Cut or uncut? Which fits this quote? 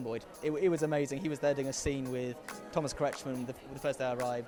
uncut